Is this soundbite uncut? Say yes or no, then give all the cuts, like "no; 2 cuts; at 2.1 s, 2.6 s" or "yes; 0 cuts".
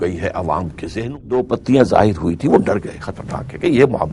no; 1 cut; at 1.0 s